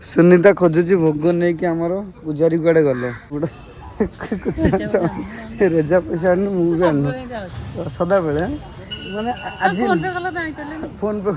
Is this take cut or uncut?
cut